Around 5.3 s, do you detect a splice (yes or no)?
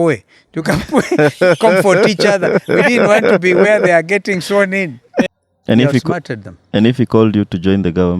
yes